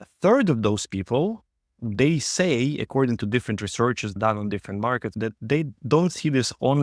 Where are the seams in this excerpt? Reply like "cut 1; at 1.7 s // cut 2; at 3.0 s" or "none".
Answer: cut 1; at 4.1 s // cut 2; at 5.1 s